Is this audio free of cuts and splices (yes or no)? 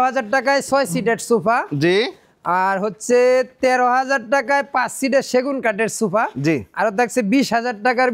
yes